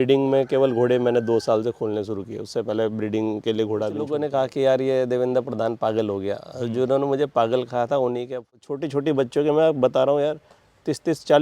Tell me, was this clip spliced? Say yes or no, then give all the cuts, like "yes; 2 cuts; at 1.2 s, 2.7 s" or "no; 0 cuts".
yes; 2 cuts; at 4.0 s, 8.4 s